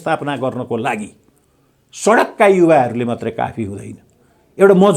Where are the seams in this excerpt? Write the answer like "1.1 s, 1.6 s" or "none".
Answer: none